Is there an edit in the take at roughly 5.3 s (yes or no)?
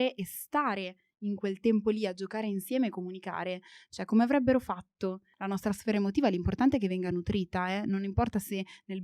yes